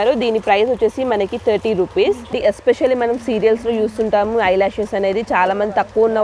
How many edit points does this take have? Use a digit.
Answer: 1